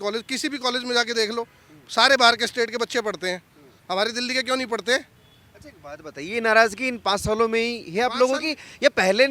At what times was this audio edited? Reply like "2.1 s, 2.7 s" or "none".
none